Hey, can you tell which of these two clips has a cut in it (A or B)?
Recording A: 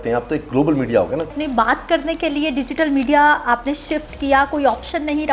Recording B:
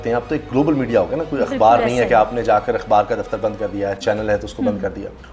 A